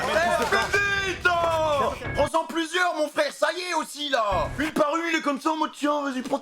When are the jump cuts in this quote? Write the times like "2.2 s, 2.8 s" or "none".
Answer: 2.0 s

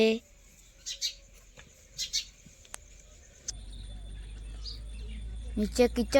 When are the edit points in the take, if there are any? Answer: 3.5 s

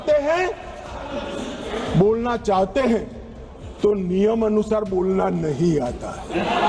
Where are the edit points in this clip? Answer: none

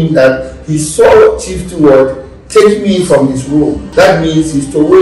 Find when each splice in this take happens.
3.8 s

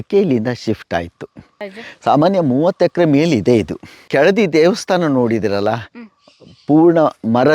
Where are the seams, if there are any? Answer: 1.8 s, 4.0 s

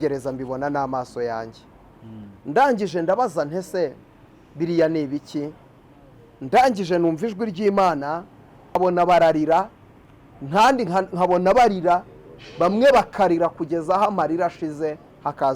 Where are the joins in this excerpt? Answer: 8.8 s

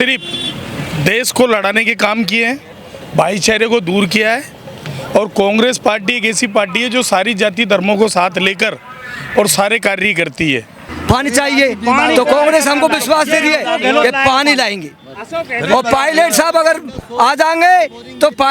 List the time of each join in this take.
10.8 s

